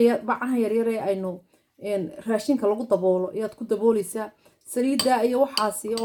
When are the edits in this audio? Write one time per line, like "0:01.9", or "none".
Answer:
none